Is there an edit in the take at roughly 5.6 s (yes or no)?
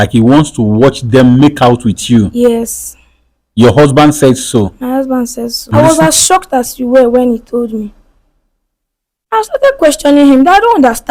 yes